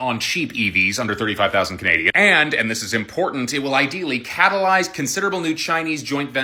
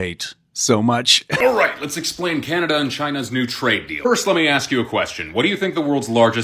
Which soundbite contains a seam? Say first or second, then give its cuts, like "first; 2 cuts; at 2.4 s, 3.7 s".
second; 1 cut; at 1.2 s